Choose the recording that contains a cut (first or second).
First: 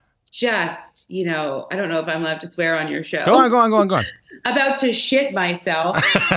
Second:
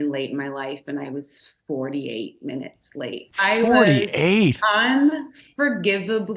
second